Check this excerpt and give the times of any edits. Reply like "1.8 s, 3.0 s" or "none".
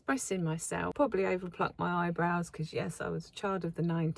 0.9 s

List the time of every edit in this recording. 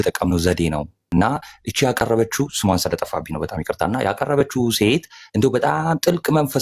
0.9 s

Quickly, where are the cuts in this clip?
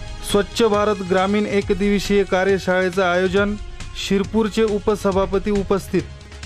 none

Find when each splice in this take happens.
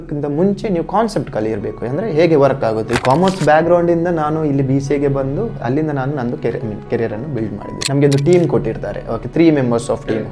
2.9 s, 7.8 s

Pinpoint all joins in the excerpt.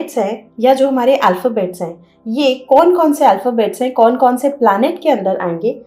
none

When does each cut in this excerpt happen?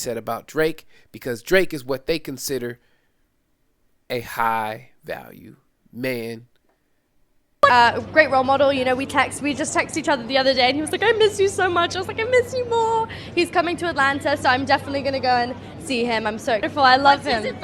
7.7 s, 16.7 s

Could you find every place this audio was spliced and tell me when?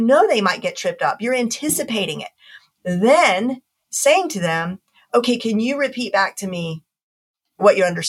2.7 s

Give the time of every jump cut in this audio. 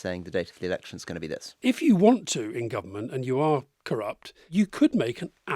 1.6 s, 4.4 s

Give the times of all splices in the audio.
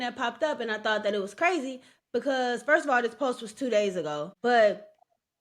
4.3 s

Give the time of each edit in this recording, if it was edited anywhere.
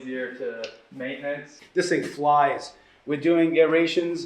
1.5 s

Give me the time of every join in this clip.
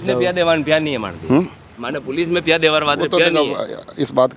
none

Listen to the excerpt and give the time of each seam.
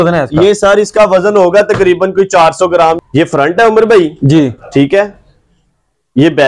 3.0 s

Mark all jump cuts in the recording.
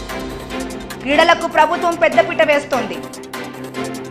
0.9 s, 2.9 s

